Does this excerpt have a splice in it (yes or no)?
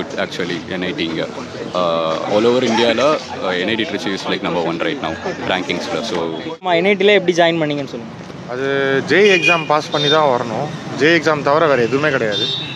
yes